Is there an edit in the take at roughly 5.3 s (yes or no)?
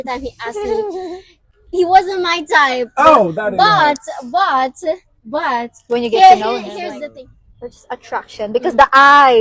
no